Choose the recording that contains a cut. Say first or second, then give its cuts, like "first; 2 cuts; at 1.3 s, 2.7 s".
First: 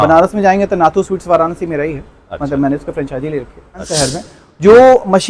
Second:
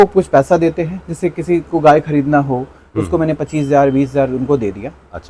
first; 1 cut; at 3.9 s